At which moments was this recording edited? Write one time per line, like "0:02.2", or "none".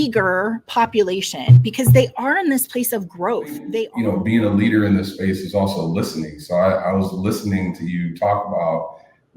0:03.7